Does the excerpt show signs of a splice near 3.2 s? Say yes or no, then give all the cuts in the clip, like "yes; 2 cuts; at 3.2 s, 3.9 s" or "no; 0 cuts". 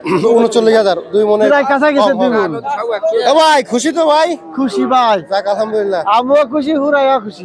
yes; 1 cut; at 3.2 s